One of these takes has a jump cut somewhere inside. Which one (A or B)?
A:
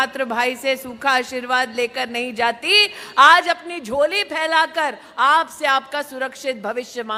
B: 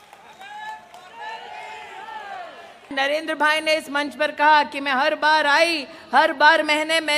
B